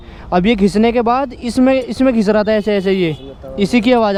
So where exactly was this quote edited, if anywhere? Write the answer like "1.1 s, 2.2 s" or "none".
none